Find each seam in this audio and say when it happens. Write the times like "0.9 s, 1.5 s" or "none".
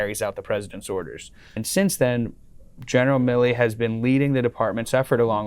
1.6 s